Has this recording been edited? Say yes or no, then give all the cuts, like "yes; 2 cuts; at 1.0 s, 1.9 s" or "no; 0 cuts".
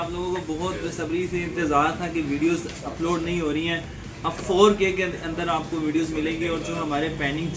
no; 0 cuts